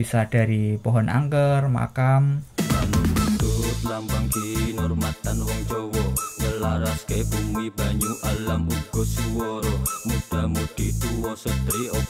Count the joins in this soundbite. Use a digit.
1